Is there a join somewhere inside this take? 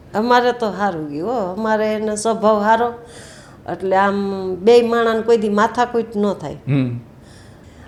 no; 0 cuts

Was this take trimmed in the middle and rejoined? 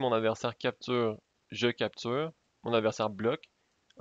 yes; 1 cut; at 2.5 s

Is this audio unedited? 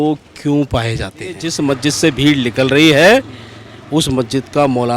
no; 1 cut; at 1.5 s

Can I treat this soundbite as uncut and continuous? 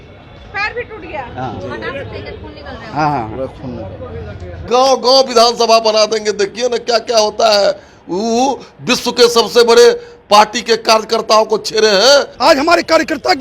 no; 2 cuts; at 4.6 s, 12.3 s

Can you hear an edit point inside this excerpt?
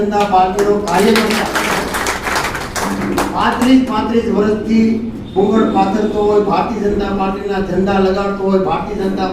no; 0 cuts

